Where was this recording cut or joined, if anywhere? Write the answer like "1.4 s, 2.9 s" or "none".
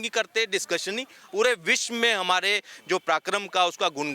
1.2 s